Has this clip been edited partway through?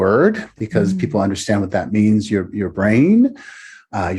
no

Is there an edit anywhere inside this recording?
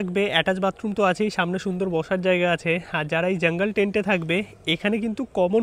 no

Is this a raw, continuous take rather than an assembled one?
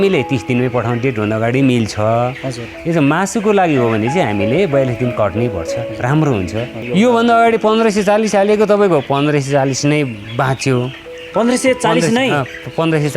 no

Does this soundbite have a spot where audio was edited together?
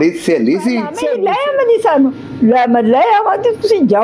yes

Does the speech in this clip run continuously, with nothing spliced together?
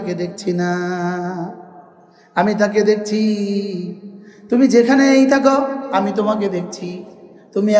yes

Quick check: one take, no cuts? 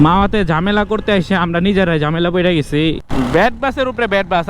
no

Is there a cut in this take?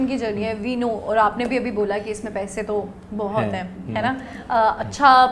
no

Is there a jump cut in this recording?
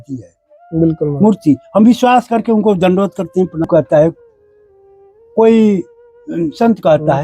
yes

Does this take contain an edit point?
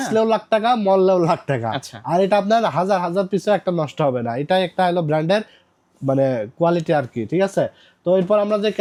no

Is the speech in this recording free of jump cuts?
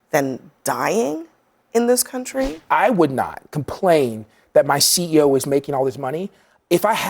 no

